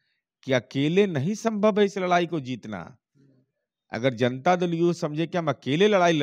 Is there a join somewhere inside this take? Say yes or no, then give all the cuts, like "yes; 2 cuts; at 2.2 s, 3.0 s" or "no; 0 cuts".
no; 0 cuts